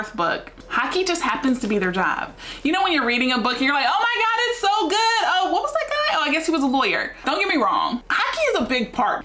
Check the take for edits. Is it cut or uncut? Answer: uncut